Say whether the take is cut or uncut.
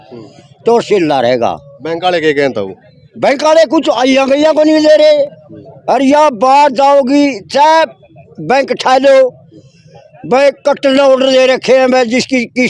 uncut